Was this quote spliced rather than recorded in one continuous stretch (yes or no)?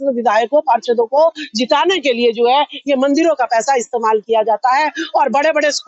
no